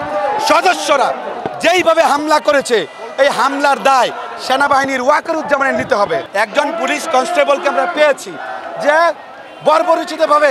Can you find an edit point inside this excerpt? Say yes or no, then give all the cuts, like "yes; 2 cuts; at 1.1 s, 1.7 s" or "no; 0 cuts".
yes; 1 cut; at 6.2 s